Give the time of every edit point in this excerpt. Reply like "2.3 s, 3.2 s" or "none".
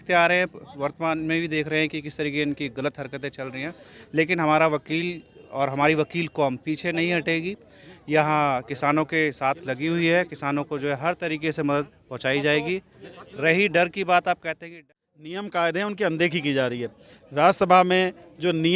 14.7 s